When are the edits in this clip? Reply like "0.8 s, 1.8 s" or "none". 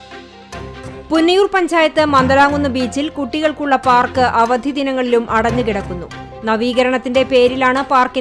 1.0 s